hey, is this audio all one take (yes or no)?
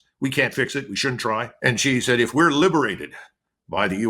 no